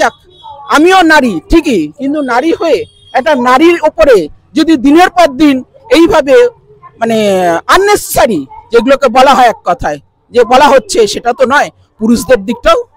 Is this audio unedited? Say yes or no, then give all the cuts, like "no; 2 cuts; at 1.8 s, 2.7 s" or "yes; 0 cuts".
yes; 0 cuts